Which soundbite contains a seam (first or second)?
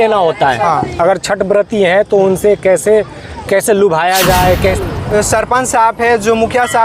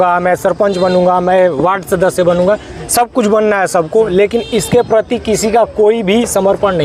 first